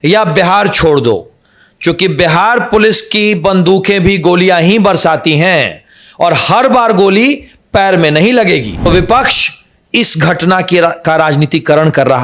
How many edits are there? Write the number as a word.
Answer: one